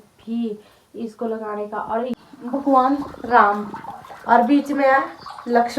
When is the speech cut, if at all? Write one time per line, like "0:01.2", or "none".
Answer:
0:02.1